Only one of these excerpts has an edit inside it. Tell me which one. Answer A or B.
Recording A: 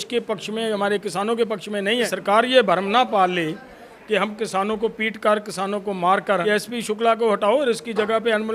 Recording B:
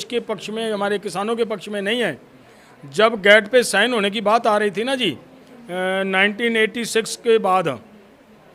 A